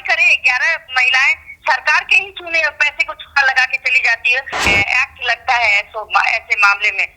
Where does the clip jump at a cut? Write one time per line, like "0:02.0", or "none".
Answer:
0:04.7